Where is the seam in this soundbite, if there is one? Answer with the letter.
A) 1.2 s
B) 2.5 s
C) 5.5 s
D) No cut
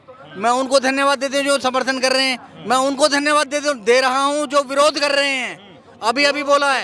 D